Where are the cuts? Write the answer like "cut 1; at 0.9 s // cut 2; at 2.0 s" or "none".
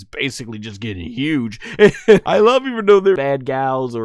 cut 1; at 2.2 s // cut 2; at 3.2 s